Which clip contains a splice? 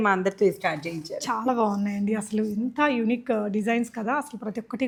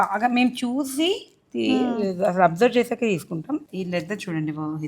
second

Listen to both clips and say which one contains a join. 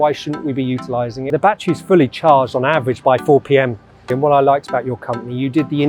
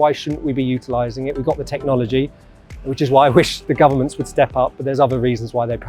first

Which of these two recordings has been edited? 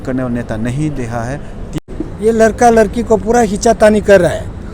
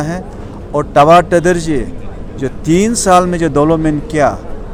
first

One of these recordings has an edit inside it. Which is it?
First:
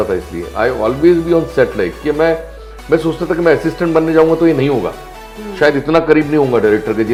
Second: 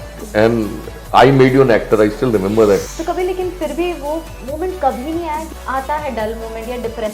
second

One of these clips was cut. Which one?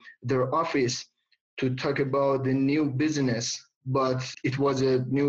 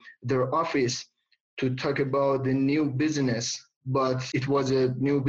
second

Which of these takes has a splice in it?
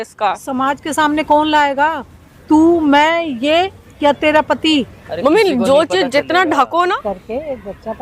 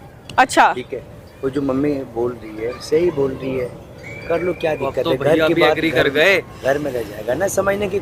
first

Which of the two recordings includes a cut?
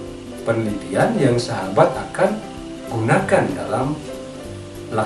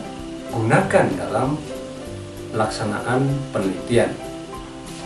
second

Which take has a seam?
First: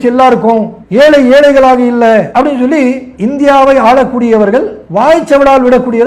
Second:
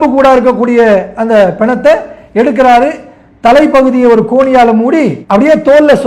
first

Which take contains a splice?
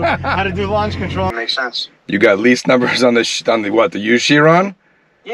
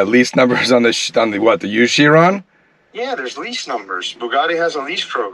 first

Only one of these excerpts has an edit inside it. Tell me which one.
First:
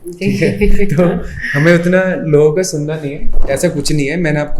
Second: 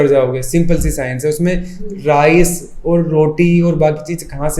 first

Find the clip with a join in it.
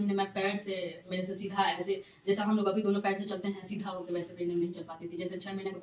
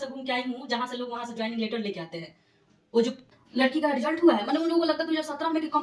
second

